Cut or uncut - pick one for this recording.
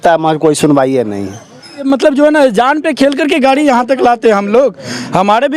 cut